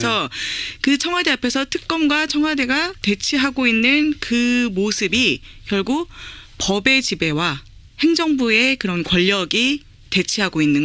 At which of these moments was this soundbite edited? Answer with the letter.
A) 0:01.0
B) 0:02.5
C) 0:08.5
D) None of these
A